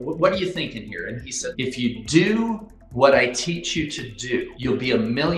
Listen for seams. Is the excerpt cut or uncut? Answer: cut